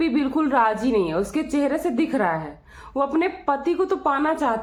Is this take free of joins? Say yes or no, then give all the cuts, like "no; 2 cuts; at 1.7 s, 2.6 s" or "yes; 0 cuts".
yes; 0 cuts